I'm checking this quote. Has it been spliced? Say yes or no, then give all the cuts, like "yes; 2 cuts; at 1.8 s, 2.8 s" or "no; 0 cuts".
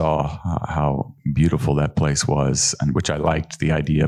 no; 0 cuts